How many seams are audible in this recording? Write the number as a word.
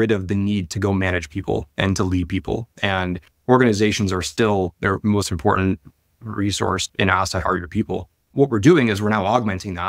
one